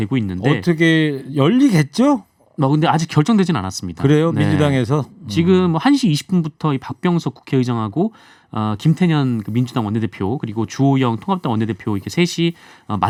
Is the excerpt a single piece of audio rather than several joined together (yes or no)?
yes